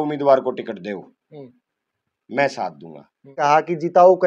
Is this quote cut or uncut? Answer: cut